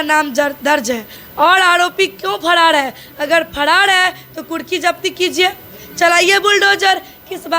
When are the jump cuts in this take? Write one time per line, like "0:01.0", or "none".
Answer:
0:01.2